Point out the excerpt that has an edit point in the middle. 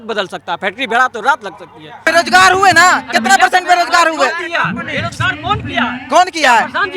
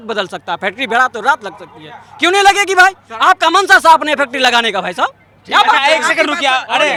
first; 1 cut; at 2.0 s

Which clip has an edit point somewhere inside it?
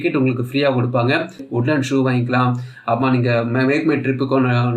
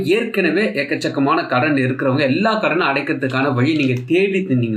first; 1 cut; at 1.5 s

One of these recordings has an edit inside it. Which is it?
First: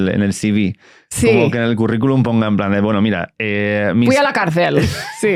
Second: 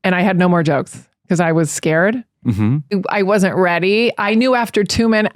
second; 1 cut; at 2.9 s

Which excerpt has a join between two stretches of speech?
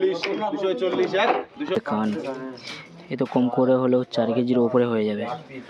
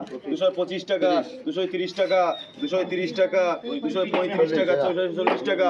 first; 1 cut; at 1.8 s

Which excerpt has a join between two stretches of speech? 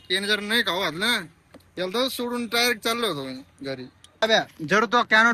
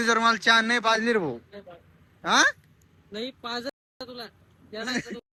first; 1 cut; at 4.2 s

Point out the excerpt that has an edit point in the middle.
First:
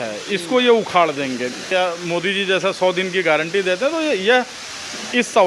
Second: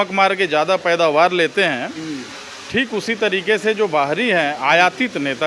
first; 1 cut; at 1.7 s

